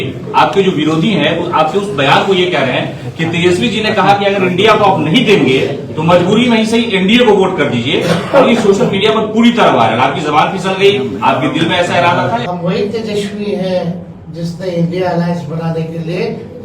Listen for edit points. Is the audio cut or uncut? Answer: cut